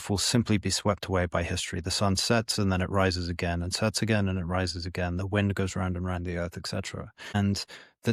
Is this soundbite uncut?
yes; 0 cuts

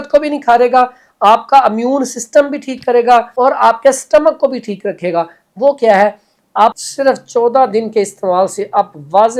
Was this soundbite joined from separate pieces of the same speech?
yes; 2 cuts; at 3.3 s, 6.8 s

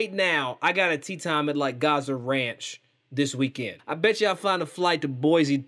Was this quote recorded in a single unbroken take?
no; 1 cut; at 3.8 s

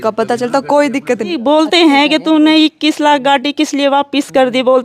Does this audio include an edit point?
yes; 1 cut; at 1.3 s

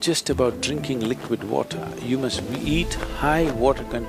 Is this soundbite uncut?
yes; 0 cuts

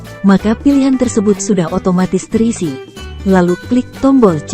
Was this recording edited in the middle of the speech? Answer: yes; 1 cut; at 2.9 s

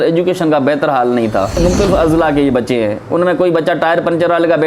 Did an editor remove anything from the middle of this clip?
yes; 1 cut; at 1.6 s

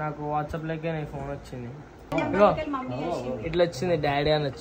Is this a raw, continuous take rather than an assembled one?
no; 1 cut; at 2.1 s

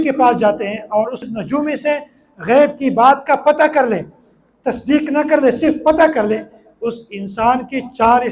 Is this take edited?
yes; 1 cut; at 1.3 s

